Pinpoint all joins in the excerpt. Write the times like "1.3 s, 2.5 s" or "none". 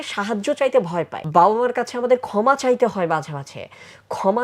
1.2 s

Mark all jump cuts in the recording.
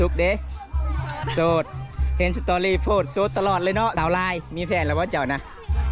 4.0 s

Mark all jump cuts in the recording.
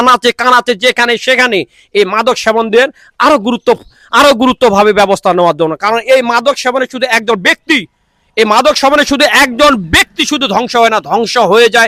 none

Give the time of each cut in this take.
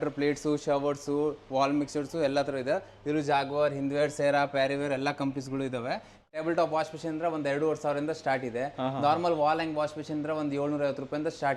6.3 s

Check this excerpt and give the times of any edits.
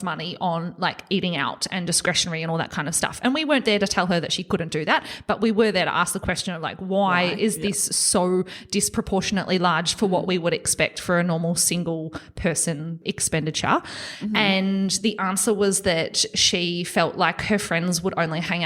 13.0 s

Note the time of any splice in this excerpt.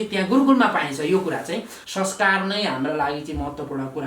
1.8 s

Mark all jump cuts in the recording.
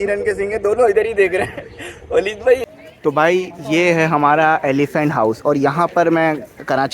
2.6 s

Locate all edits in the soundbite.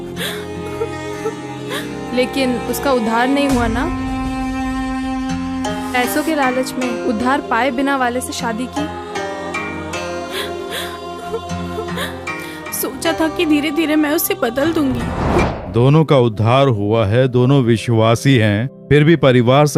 15.6 s

